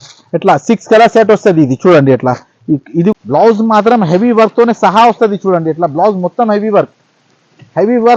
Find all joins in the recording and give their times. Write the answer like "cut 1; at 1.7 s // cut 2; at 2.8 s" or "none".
cut 1; at 3.1 s